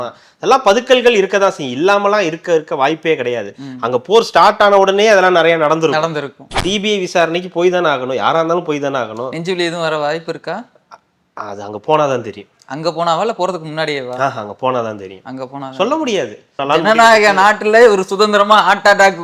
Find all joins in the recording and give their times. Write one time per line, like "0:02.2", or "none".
0:06.4
0:16.6